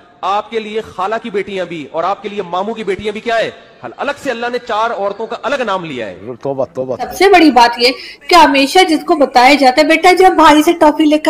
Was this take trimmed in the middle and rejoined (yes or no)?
yes